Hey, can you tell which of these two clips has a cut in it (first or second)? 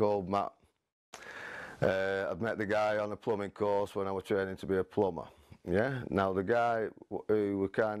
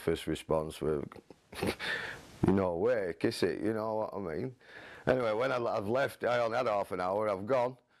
first